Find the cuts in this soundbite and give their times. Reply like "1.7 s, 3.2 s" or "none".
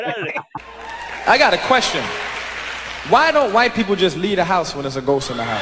none